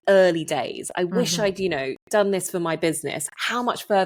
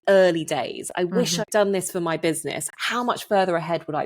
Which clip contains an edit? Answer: second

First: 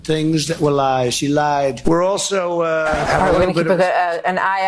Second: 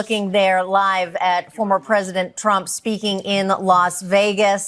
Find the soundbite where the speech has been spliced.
first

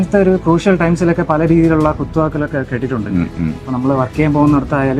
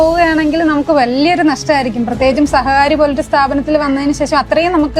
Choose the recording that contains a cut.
first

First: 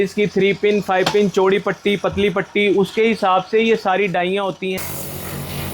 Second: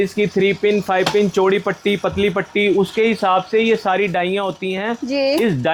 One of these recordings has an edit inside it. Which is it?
first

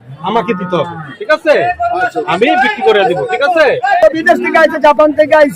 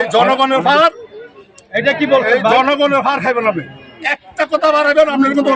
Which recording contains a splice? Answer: first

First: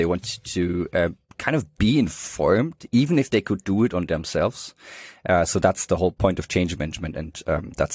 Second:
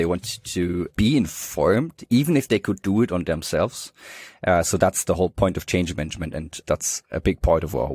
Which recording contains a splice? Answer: second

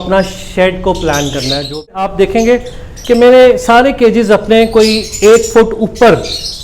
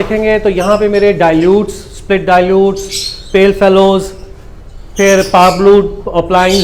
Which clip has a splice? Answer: first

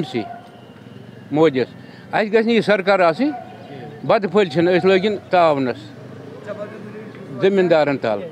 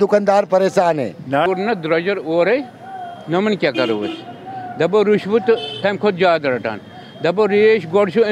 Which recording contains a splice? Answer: second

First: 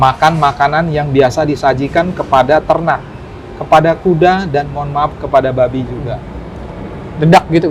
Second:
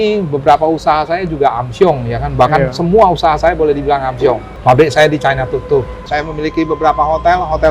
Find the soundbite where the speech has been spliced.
second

